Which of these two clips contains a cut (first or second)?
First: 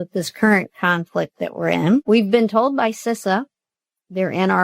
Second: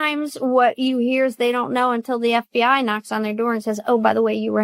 first